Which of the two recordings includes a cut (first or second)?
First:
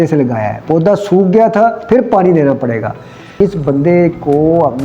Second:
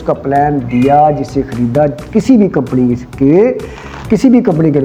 first